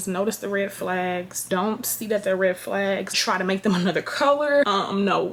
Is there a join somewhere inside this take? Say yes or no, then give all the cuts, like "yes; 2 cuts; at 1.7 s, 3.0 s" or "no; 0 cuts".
no; 0 cuts